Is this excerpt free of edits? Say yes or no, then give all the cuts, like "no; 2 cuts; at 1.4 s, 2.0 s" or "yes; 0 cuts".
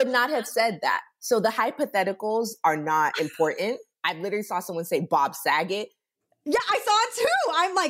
yes; 0 cuts